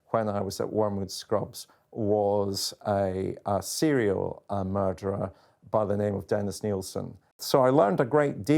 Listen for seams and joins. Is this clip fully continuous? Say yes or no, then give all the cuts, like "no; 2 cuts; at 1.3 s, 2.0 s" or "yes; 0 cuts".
no; 1 cut; at 7.3 s